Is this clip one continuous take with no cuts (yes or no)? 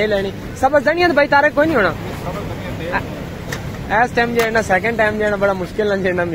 yes